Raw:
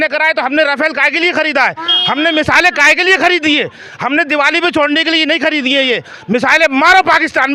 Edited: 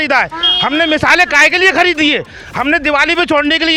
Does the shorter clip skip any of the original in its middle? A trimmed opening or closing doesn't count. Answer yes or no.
no